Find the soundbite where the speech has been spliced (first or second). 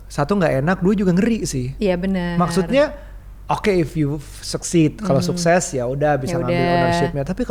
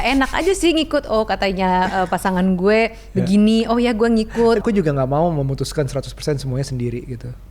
second